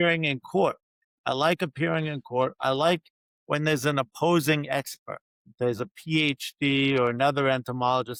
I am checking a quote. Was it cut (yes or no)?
no